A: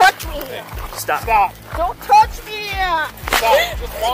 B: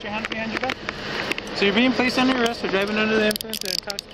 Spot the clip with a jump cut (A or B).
A